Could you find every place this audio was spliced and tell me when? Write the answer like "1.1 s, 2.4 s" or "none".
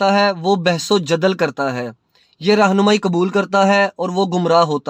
none